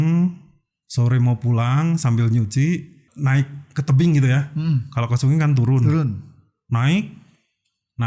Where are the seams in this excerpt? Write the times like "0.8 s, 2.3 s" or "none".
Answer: 3.0 s